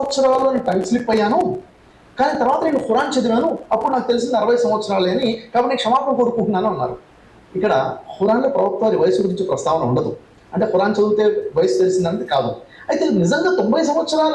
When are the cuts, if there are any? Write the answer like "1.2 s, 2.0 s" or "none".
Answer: none